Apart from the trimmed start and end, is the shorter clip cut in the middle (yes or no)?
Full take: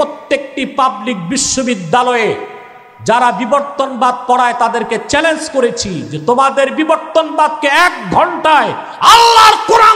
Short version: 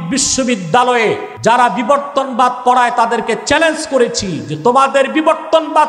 yes